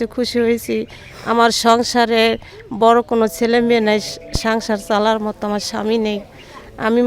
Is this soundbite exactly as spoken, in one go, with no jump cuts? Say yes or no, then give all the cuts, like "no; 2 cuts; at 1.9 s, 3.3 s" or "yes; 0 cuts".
yes; 0 cuts